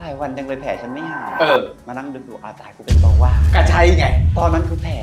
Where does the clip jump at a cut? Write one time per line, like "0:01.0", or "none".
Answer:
none